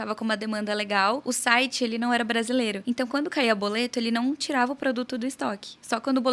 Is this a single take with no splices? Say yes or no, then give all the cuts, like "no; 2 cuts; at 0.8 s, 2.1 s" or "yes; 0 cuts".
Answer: no; 2 cuts; at 1.2 s, 2.8 s